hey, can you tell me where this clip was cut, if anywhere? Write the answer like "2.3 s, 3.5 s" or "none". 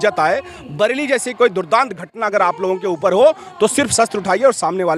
none